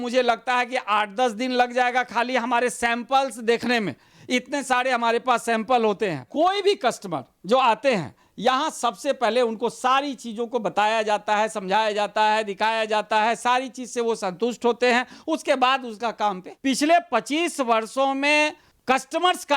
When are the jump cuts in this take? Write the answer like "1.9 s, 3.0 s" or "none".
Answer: 6.3 s, 16.5 s